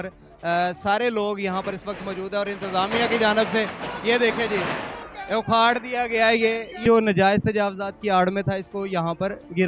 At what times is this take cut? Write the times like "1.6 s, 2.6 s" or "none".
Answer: 6.8 s